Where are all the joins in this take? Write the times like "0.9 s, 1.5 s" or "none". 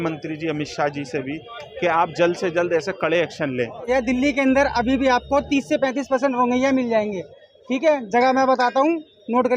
3.9 s